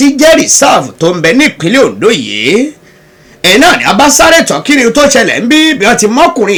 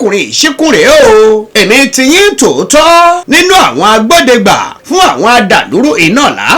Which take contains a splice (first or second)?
second